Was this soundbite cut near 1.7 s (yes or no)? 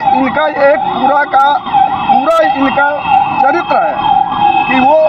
no